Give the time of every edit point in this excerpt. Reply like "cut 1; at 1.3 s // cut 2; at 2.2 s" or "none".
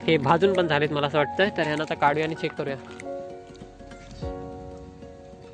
cut 1; at 3.0 s